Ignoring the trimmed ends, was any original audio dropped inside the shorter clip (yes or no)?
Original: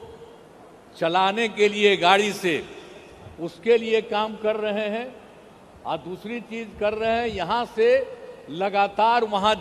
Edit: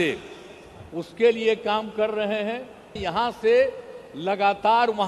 yes